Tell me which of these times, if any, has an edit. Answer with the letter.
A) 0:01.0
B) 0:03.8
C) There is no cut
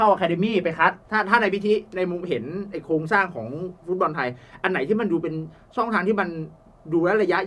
A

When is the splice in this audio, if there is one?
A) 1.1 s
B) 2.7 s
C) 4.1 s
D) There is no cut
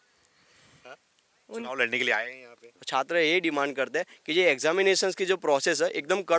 B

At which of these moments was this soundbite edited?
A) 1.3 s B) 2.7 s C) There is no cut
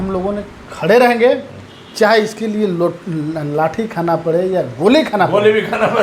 C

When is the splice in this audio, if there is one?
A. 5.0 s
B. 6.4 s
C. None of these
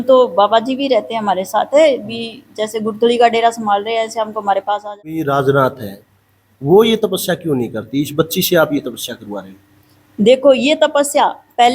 A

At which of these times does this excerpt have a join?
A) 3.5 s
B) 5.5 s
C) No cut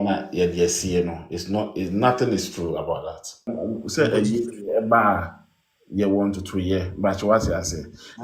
A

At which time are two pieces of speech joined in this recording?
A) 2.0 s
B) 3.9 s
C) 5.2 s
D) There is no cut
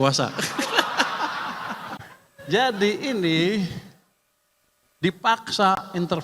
A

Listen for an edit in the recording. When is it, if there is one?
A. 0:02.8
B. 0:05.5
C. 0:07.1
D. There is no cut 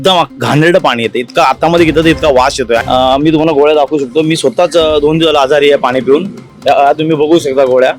A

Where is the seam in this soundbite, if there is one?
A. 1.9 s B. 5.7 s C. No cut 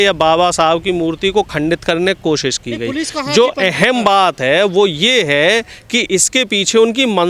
C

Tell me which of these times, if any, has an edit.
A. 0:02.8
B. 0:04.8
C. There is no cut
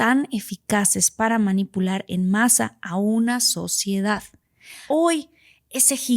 B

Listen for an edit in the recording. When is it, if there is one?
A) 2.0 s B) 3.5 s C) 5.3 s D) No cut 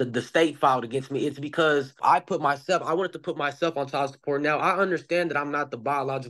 A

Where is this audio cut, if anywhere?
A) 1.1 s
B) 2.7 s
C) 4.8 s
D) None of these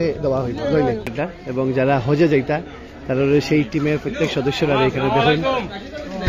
A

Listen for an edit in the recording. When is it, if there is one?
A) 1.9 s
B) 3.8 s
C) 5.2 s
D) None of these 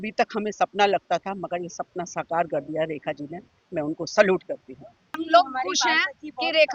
C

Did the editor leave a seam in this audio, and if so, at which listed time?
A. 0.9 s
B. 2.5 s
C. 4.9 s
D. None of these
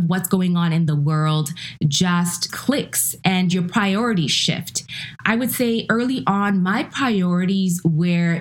B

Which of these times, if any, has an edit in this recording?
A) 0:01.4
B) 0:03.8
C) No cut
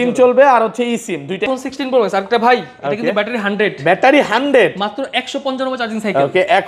A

